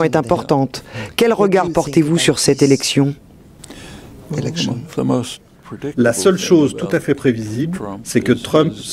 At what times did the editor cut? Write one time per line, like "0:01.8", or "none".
0:03.8